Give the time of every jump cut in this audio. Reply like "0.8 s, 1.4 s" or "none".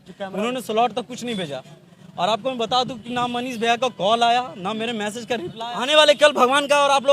5.5 s